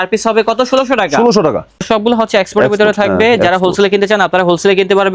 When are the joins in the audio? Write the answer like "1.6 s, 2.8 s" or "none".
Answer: 1.8 s